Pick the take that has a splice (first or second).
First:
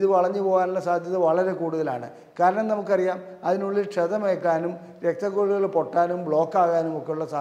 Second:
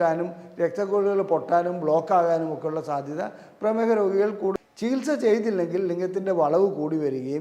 second